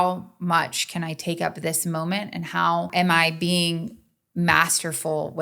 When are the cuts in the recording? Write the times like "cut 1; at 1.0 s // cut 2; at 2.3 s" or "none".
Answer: cut 1; at 2.9 s

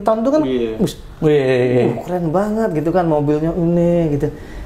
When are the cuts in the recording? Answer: none

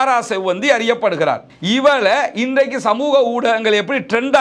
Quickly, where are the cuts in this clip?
cut 1; at 1.5 s

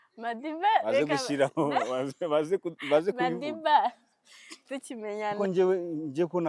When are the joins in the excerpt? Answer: cut 1; at 5.5 s

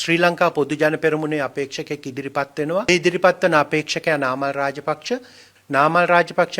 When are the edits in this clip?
cut 1; at 2.9 s // cut 2; at 5.4 s

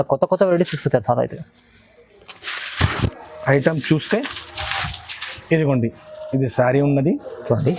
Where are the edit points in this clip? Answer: cut 1; at 3.1 s

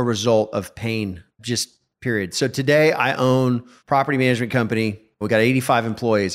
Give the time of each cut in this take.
cut 1; at 1.4 s // cut 2; at 3.7 s // cut 3; at 5.2 s

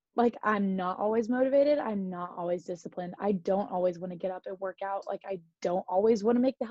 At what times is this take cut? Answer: none

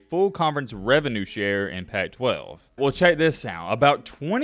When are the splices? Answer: cut 1; at 2.6 s

